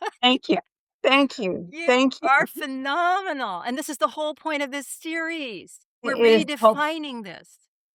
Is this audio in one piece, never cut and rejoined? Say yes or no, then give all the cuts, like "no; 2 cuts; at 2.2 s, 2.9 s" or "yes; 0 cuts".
yes; 0 cuts